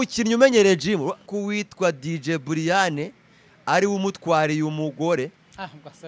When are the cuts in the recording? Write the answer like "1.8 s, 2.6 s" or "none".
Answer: 1.3 s